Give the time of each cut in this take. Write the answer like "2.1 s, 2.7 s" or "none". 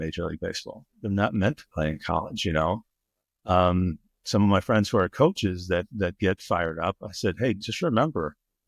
none